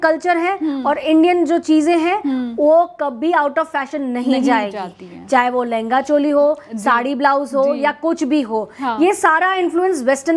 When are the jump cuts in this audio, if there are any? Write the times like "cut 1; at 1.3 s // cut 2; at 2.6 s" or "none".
none